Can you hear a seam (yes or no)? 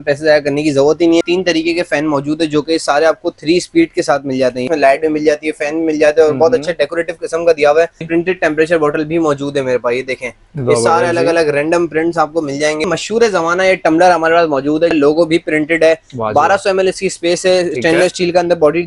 yes